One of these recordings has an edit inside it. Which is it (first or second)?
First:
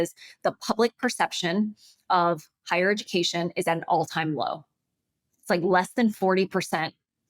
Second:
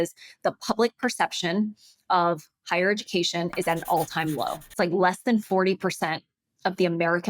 second